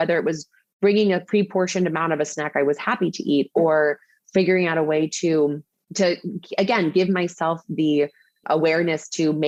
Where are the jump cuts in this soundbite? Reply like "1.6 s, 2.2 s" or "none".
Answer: none